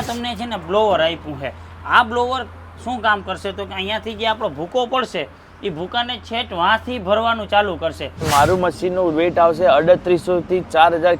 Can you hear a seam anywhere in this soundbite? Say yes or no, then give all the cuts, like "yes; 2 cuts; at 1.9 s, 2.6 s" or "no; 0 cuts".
yes; 1 cut; at 8.2 s